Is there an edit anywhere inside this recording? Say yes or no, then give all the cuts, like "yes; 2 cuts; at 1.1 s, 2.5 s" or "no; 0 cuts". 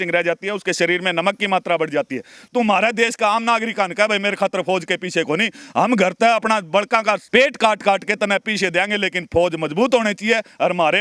yes; 2 cuts; at 2.4 s, 7.2 s